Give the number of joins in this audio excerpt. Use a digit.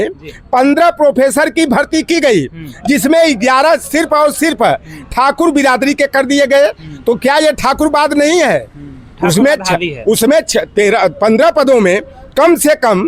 0